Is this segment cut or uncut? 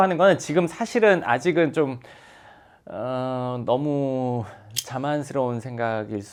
uncut